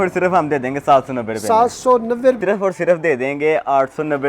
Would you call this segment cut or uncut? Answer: cut